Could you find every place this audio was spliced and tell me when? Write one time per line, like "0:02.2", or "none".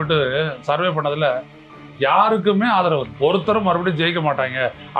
0:03.1